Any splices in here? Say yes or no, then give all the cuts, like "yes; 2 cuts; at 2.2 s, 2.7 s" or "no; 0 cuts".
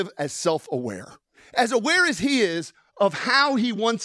yes; 1 cut; at 1.4 s